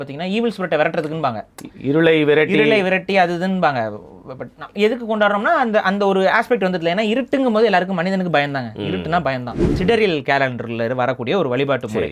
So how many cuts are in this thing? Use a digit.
1